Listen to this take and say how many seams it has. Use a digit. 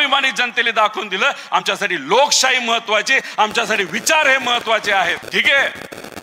1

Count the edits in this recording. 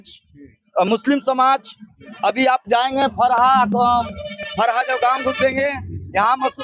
0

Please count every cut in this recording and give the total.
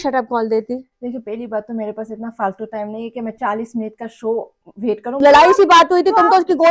1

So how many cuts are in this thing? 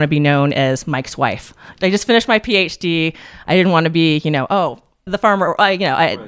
2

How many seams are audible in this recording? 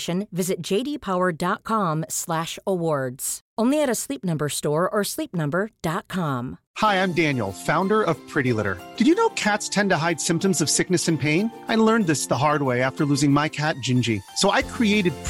1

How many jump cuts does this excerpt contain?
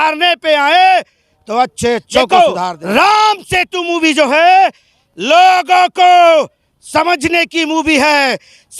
1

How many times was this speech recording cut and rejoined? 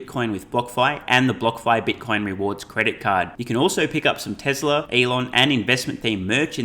1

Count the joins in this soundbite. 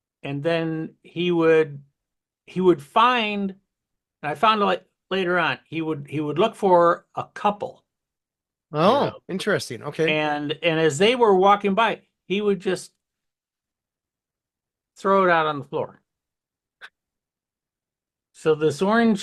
0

